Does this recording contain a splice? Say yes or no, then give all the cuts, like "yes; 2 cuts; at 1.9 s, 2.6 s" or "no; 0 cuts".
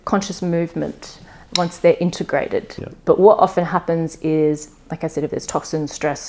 yes; 1 cut; at 2.7 s